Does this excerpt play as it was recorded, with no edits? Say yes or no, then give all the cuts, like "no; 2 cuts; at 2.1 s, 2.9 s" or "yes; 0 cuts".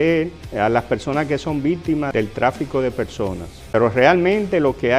no; 1 cut; at 3.5 s